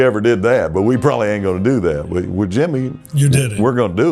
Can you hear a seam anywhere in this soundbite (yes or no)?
no